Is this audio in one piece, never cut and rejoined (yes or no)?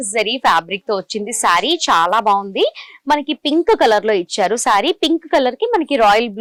yes